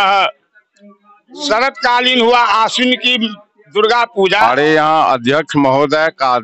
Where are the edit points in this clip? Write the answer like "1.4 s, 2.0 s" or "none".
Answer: 4.4 s

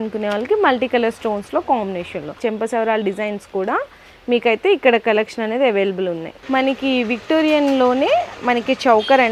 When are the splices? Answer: 2.4 s, 6.3 s

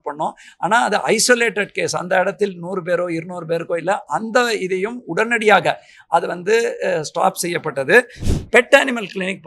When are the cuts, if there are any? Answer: 8.2 s

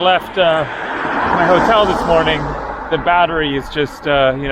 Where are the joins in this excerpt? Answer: none

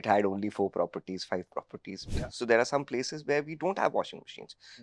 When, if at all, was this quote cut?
2.0 s

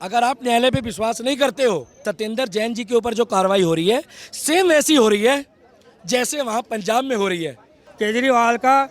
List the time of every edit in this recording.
1.9 s, 7.8 s

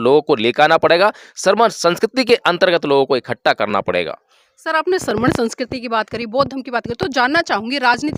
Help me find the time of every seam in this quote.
none

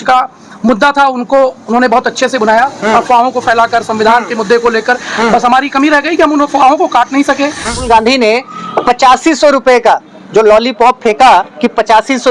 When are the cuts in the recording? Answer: 7.8 s

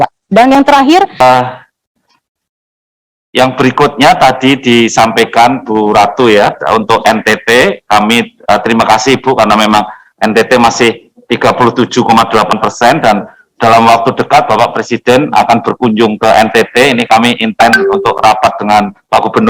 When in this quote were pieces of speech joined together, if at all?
1.2 s

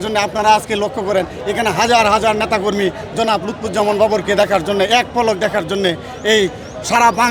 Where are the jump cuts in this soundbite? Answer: none

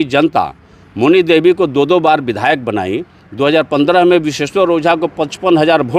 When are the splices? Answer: none

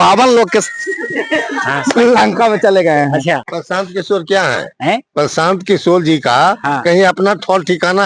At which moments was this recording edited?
3.5 s, 5.1 s

